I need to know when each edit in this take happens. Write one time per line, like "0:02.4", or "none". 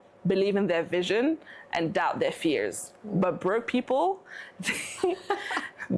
none